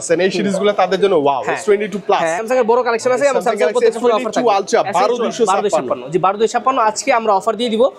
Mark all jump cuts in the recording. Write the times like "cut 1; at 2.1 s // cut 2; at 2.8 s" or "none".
cut 1; at 2.4 s